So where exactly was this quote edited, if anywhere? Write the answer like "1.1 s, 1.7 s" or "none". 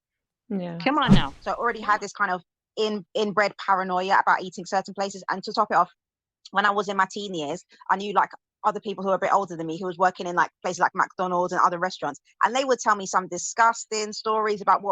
1.4 s